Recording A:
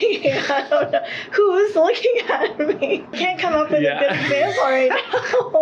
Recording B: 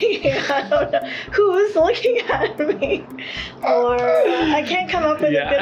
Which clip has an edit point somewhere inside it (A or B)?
A